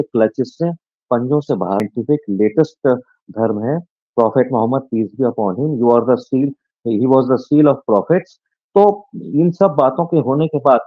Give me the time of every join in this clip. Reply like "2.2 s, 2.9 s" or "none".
1.8 s